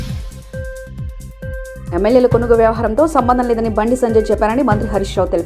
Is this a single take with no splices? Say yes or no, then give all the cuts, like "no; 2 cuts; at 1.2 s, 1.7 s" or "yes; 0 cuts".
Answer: no; 1 cut; at 1.6 s